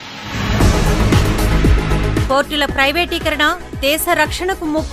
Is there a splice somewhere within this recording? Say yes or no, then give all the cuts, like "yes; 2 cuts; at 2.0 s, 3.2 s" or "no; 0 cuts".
no; 0 cuts